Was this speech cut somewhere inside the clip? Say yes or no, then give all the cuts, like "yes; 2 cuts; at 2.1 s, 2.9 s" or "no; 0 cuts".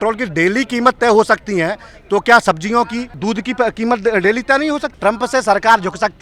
yes; 2 cuts; at 3.1 s, 4.9 s